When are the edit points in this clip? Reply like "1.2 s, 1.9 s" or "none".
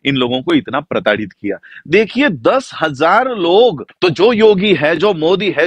3.9 s

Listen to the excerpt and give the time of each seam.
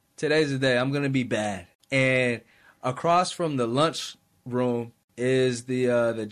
1.7 s, 5.0 s

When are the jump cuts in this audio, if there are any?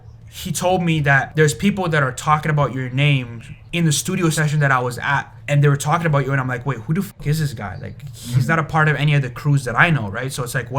1.3 s, 3.6 s, 5.3 s

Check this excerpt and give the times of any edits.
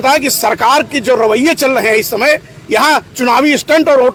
none

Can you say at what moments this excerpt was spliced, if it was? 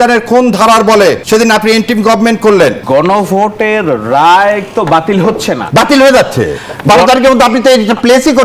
1.2 s, 2.8 s, 5.6 s

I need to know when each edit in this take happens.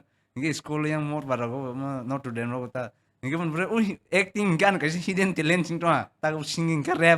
6.2 s

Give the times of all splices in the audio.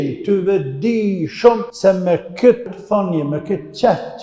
1.7 s, 2.8 s

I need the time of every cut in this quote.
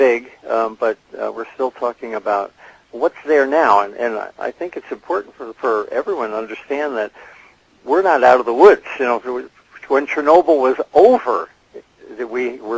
10.1 s

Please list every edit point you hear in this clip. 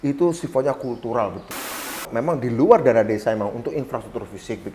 1.9 s

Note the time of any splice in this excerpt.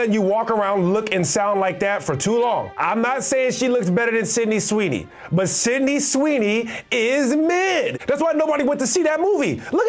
2.7 s, 8.0 s

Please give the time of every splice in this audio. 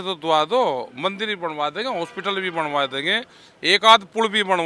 none

